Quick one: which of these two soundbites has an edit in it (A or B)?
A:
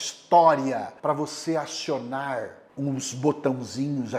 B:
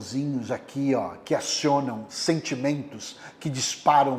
A